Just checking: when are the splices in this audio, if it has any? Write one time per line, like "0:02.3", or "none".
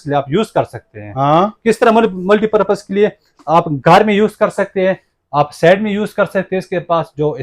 none